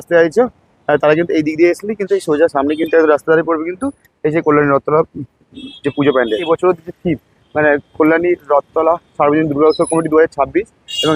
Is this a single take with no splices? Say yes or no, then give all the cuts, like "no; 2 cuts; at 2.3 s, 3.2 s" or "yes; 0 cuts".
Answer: yes; 0 cuts